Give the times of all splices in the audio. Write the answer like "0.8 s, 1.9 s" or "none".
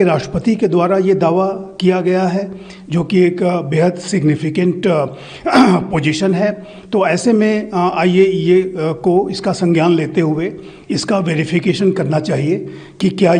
none

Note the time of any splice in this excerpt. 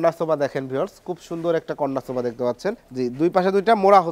2.9 s

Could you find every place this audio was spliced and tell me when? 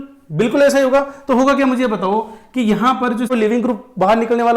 3.3 s

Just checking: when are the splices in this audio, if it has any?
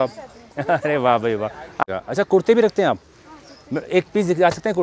1.8 s

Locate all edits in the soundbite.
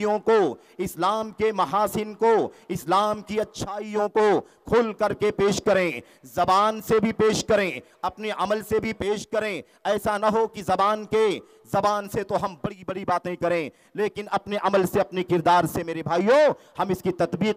none

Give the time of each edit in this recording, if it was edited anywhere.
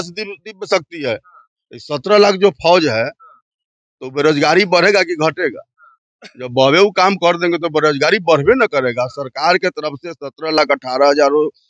none

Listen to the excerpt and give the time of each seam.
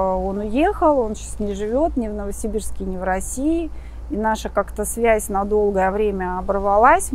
none

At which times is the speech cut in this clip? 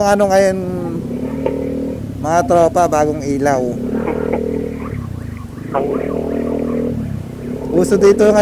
none

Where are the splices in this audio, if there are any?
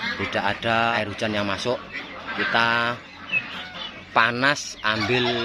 1.0 s

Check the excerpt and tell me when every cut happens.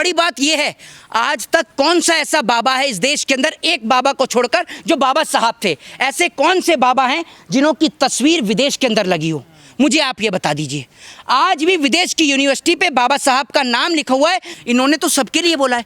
14.5 s

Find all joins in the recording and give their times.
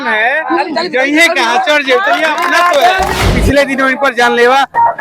3.3 s

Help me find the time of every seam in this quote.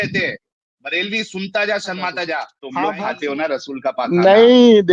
2.6 s

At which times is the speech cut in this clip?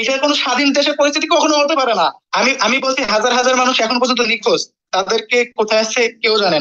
2.2 s

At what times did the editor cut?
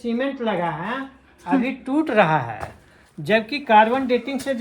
none

